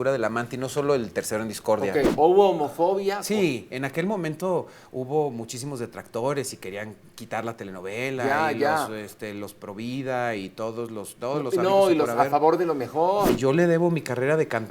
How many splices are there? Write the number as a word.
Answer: two